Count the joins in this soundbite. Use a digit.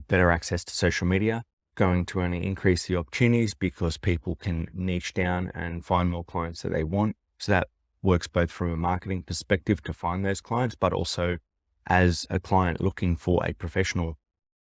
1